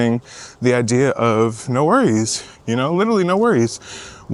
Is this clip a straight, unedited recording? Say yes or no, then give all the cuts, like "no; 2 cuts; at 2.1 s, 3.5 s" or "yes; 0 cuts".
yes; 0 cuts